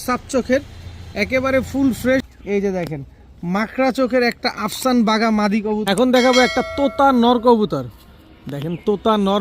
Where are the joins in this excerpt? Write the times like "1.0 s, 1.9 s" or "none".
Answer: 2.3 s, 5.8 s

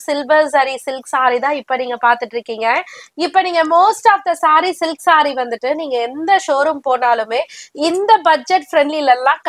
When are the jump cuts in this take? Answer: none

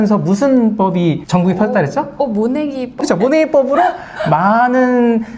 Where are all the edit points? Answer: 3.0 s

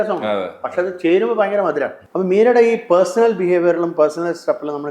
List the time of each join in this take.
2.0 s

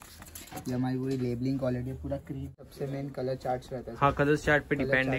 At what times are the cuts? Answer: 2.7 s

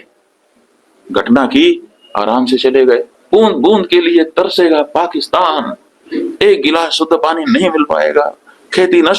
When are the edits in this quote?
3.1 s

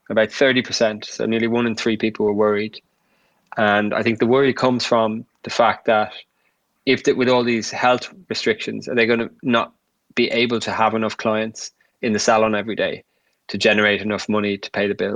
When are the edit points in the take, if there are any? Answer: none

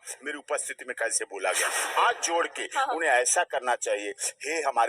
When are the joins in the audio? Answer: 2.0 s

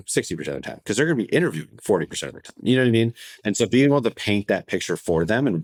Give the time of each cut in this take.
none

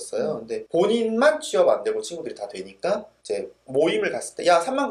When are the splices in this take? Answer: 3.1 s

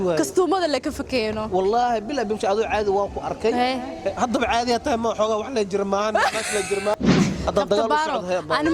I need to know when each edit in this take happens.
6.9 s

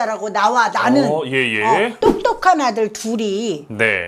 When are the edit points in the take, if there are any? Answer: 2.1 s

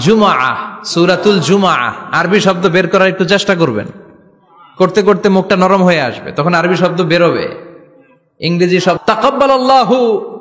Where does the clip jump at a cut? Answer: 9.0 s

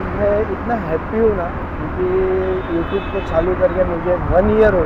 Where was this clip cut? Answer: none

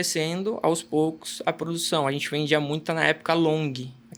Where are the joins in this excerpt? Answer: none

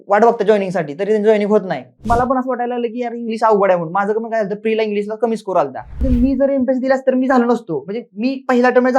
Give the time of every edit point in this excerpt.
2.0 s, 6.0 s

